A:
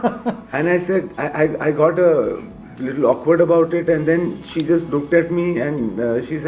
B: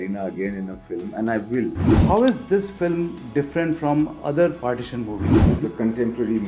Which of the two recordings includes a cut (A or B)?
B